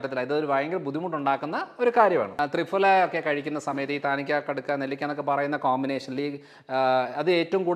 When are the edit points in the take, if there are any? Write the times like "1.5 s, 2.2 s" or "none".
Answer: 2.3 s